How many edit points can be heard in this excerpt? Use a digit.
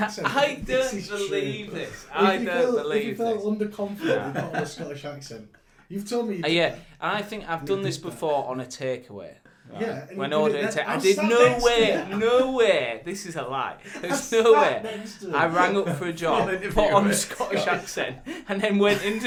0